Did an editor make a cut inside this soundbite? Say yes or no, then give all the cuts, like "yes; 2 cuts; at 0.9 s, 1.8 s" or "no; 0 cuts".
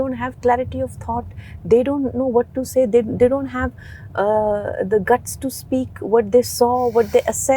no; 0 cuts